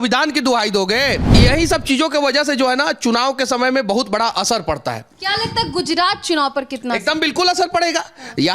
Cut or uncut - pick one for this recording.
cut